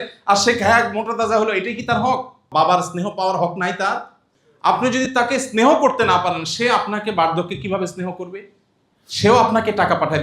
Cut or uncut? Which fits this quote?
cut